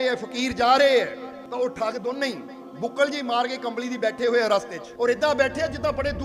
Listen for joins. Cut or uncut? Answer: cut